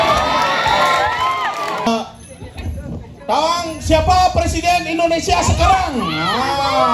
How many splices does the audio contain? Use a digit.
1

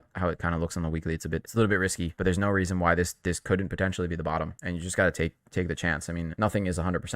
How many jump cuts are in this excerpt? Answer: 4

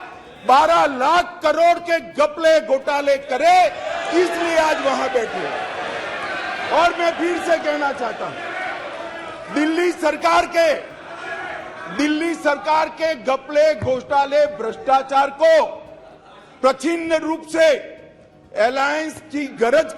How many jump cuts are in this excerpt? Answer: 0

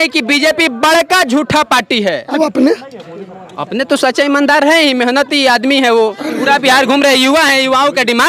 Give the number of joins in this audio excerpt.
0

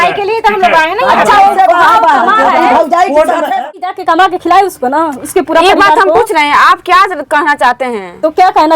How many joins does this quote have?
1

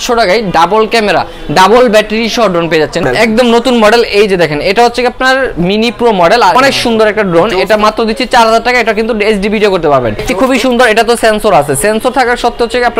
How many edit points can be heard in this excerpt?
3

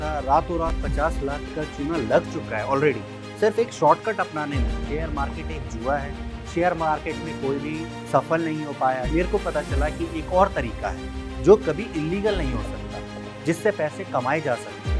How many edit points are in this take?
0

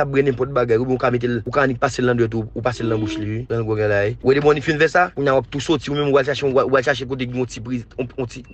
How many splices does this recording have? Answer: 4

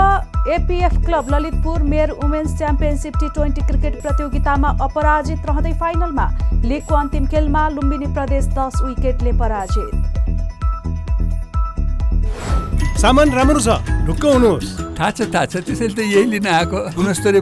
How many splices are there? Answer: 1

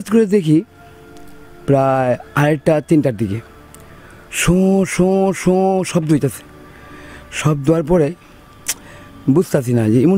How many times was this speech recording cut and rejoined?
0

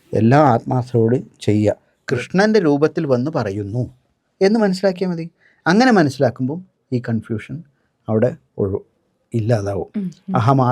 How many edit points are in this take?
1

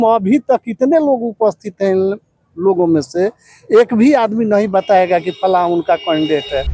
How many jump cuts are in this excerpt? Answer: 0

